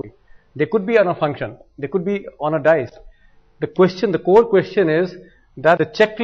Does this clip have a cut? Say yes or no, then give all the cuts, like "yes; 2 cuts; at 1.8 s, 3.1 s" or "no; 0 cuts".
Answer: no; 0 cuts